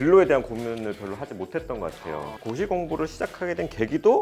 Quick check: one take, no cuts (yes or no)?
no